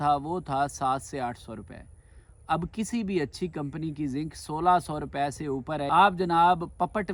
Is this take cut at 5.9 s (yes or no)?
yes